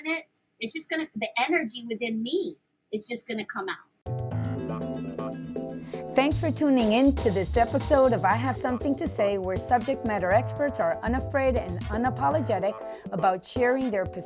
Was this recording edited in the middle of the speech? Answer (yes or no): yes